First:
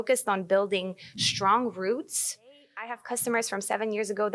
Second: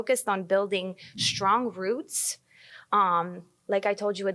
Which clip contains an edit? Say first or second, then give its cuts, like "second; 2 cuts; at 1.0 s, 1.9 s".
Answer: first; 1 cut; at 2.9 s